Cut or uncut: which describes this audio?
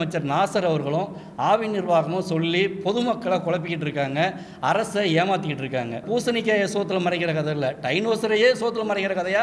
cut